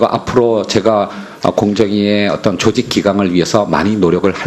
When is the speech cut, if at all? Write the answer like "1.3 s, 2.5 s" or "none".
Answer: 3.0 s